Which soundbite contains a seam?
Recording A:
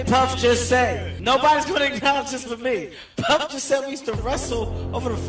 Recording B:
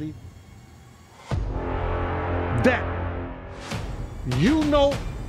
A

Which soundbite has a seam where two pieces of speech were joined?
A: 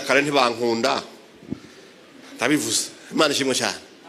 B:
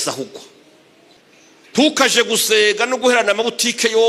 B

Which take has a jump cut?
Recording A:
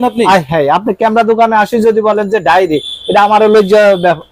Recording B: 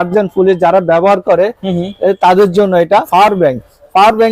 B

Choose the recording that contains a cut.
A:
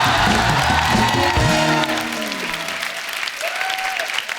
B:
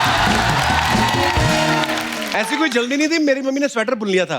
B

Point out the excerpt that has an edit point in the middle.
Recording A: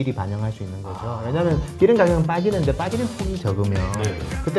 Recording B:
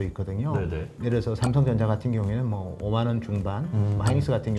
B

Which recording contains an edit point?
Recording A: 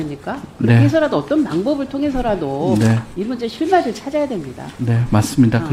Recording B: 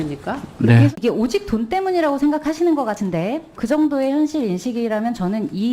B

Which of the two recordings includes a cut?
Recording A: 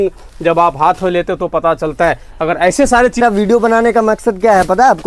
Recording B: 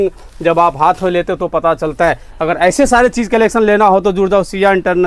A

